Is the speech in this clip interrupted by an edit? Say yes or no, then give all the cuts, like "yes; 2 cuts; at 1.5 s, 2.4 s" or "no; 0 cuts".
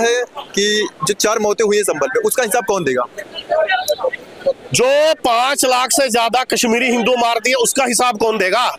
no; 0 cuts